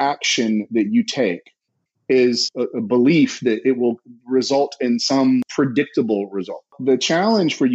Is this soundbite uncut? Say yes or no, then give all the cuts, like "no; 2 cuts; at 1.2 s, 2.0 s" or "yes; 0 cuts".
no; 3 cuts; at 2.5 s, 5.5 s, 6.8 s